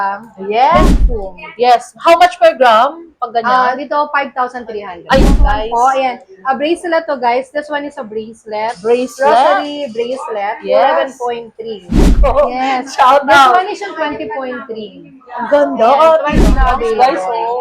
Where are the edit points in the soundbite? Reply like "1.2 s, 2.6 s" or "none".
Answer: 0.8 s, 5.2 s, 12.1 s, 16.6 s